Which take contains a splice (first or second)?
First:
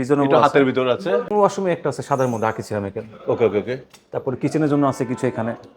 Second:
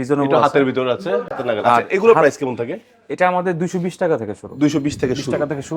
first